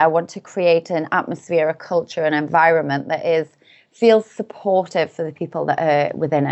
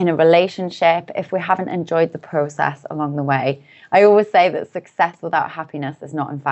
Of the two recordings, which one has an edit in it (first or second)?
second